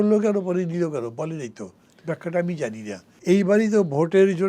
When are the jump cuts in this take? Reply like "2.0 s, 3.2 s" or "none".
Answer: 3.1 s